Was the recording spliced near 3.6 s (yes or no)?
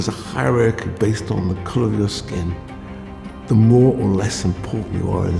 no